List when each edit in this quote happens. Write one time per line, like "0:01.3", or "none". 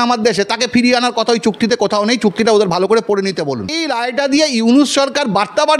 0:03.8